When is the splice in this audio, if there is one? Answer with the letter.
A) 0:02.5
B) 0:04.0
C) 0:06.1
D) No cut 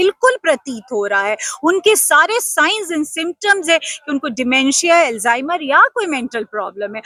D